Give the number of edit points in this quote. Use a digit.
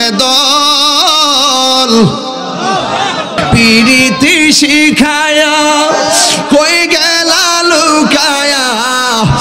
1